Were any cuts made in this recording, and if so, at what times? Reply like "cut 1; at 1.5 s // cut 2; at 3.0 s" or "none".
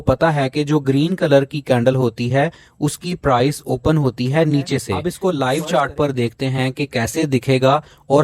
cut 1; at 5.0 s